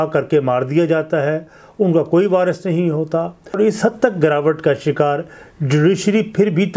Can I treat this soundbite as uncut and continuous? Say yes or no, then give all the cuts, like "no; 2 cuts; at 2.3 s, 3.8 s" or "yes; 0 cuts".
no; 1 cut; at 3.6 s